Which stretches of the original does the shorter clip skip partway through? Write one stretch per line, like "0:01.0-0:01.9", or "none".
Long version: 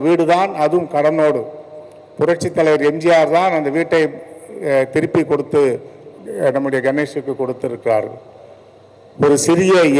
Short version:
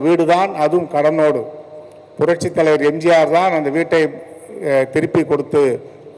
none